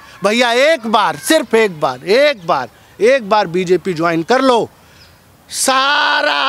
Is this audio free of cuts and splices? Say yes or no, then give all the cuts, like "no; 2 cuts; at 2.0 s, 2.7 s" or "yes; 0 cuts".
yes; 0 cuts